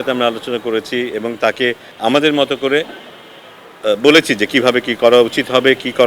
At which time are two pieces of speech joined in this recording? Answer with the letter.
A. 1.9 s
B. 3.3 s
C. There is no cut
A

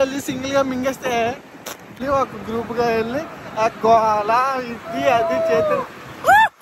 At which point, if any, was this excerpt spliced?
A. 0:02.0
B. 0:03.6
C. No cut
A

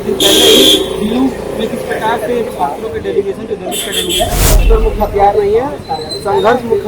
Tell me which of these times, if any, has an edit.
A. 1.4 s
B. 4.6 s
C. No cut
B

